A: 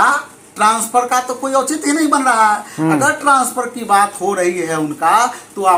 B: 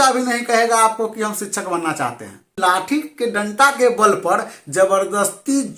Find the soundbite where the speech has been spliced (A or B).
B